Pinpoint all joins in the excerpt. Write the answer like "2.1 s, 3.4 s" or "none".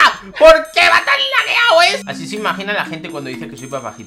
2.0 s